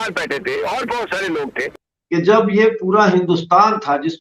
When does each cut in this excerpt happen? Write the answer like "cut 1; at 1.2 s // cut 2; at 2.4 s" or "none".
cut 1; at 1.8 s